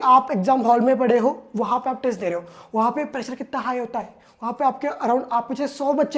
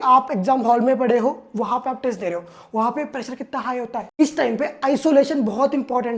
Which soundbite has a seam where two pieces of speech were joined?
second; 1 cut; at 4.2 s

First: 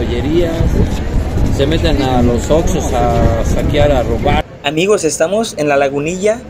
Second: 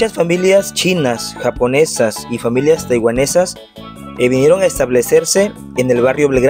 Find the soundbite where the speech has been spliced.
first; 1 cut; at 4.4 s

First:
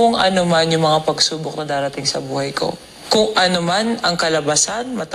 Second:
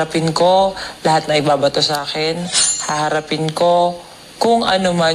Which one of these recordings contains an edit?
first; 1 cut; at 2.9 s

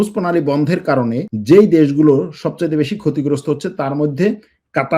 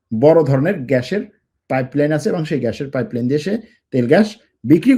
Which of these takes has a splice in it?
first; 1 cut; at 1.3 s

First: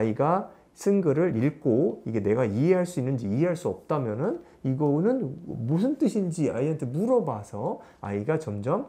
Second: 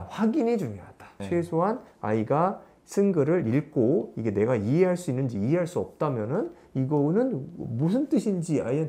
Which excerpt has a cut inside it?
second; 1 cut; at 1.2 s

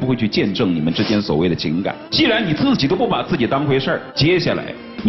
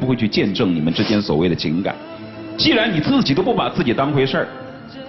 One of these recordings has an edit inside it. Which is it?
first; 2 cuts; at 2.0 s, 4.1 s

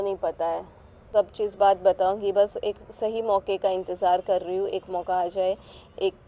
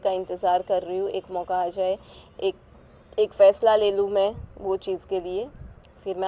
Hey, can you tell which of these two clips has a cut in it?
first; 1 cut; at 1.0 s

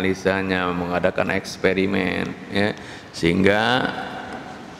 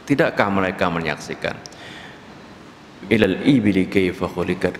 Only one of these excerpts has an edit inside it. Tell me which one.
second; 1 cut; at 3.2 s

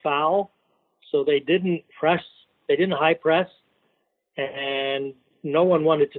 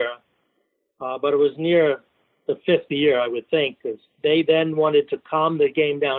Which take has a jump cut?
second; 1 cut; at 4.1 s

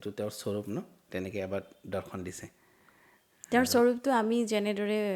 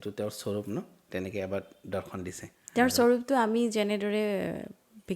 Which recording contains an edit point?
second; 1 cut; at 2.5 s

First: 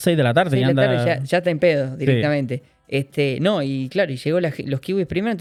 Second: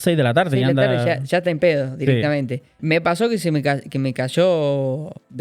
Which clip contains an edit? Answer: second; 1 cut; at 2.7 s

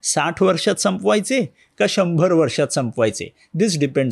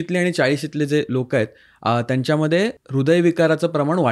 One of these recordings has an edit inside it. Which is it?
second; 1 cut; at 2.8 s

